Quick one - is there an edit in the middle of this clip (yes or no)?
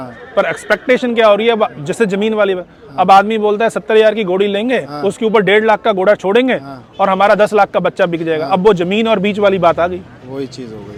no